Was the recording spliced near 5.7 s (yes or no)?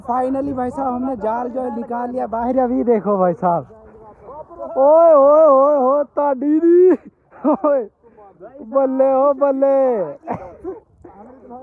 no